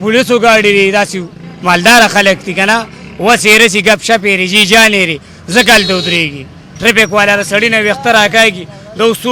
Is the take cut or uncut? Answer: cut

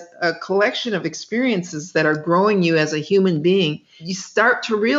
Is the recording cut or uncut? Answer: cut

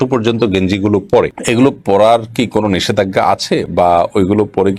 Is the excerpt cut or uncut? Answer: uncut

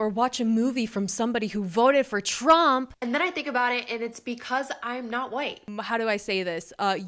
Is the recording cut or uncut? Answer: cut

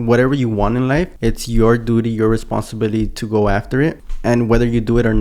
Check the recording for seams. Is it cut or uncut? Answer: cut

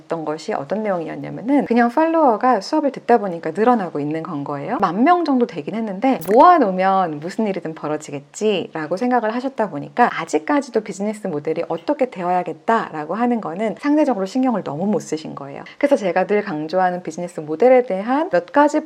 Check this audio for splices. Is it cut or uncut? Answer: uncut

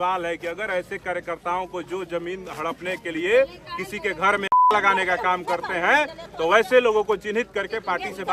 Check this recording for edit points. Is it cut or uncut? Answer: uncut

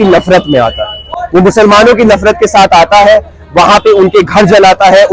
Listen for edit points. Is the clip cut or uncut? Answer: uncut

